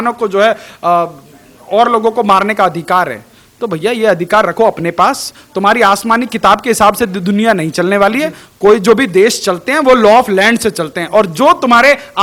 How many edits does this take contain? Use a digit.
0